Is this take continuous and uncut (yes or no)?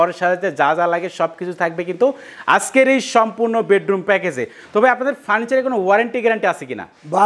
yes